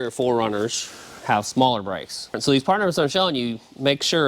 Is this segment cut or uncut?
cut